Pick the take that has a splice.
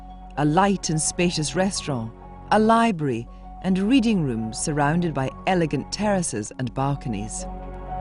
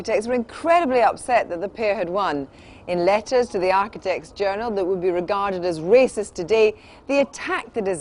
first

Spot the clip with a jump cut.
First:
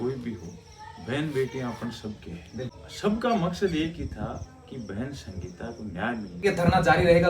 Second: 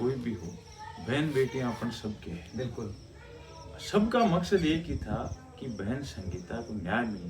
first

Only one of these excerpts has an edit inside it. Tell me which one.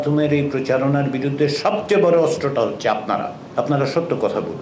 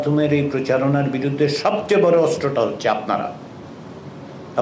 first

